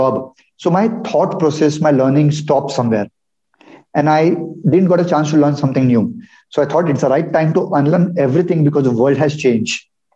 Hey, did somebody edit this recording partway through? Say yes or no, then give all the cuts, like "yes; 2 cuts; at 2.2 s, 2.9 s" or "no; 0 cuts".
no; 0 cuts